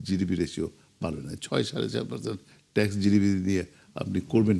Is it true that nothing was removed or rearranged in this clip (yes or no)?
yes